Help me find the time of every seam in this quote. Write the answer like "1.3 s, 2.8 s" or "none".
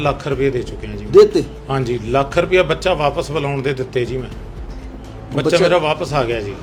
none